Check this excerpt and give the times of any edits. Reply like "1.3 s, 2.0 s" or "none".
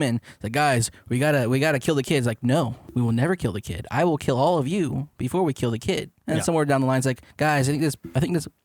2.8 s, 6.1 s, 7.3 s